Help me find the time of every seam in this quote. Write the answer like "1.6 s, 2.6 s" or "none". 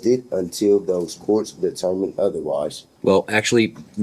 2.8 s